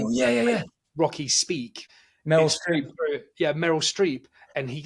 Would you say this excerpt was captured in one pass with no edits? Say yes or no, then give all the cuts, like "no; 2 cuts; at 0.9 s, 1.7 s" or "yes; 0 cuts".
no; 1 cut; at 1.8 s